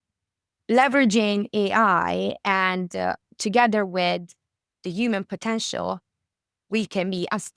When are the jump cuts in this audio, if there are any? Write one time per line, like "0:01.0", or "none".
none